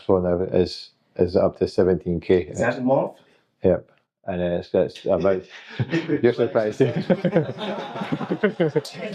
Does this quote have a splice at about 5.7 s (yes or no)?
no